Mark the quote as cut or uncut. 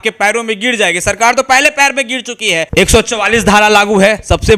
cut